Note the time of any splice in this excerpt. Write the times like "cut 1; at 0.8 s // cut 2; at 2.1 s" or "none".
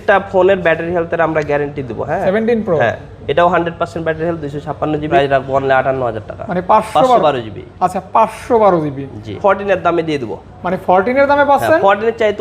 cut 1; at 2.2 s // cut 2; at 5.1 s // cut 3; at 9.4 s